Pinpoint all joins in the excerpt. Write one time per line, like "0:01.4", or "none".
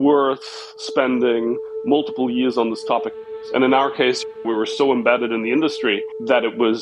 0:03.2